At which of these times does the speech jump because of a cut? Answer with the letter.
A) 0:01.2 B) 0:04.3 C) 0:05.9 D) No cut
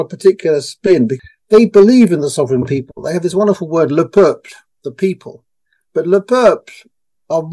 A